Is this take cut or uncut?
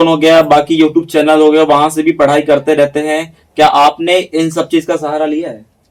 uncut